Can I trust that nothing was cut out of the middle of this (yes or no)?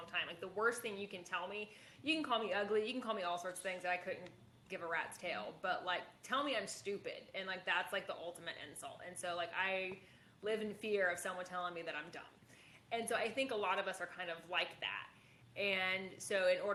yes